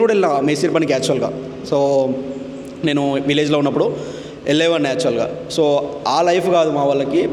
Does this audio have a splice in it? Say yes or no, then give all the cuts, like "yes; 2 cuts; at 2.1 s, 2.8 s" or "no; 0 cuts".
no; 0 cuts